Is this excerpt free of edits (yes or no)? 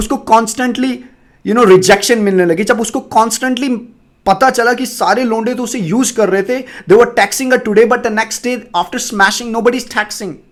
yes